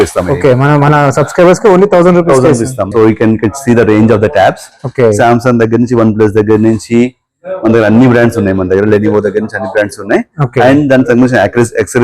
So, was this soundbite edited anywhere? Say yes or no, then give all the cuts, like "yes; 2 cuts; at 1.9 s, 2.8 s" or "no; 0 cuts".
yes; 1 cut; at 2.9 s